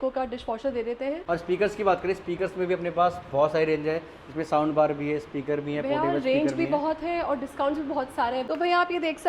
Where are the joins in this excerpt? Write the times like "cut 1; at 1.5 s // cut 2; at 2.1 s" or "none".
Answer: cut 1; at 1.2 s // cut 2; at 8.5 s